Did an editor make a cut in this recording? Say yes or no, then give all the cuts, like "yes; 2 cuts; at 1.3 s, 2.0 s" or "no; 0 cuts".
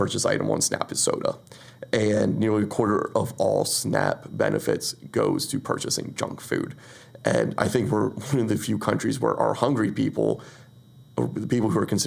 no; 0 cuts